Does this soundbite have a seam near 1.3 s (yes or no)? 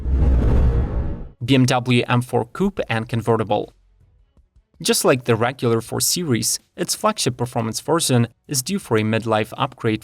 yes